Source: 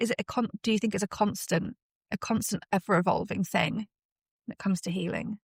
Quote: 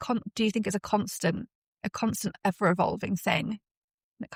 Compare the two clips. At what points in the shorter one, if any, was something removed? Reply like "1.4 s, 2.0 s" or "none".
none